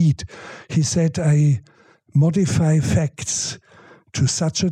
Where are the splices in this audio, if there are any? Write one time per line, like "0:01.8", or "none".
none